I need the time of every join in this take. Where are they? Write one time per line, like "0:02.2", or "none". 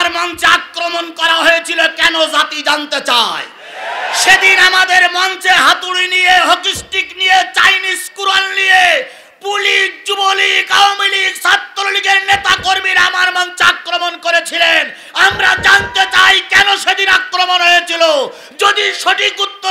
none